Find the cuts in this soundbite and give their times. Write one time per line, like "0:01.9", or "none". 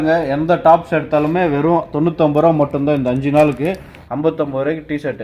0:03.9